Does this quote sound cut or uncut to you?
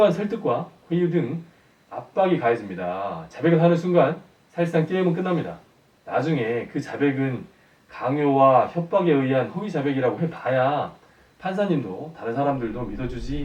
uncut